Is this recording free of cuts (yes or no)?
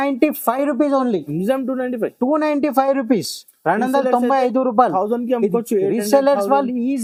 yes